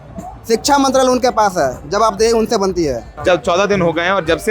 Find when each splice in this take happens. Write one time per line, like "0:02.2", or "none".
0:03.1